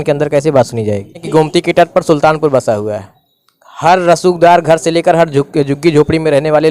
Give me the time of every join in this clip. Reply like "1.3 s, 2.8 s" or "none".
1.2 s